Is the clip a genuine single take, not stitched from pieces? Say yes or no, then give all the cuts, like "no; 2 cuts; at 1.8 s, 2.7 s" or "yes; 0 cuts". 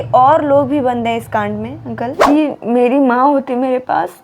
no; 1 cut; at 2.2 s